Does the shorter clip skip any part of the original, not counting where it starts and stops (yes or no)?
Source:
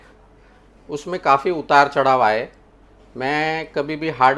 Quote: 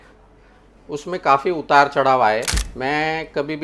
yes